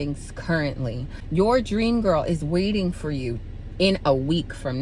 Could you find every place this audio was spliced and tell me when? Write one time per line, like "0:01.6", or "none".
0:01.1